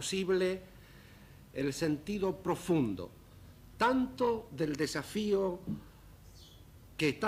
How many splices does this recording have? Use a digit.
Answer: 0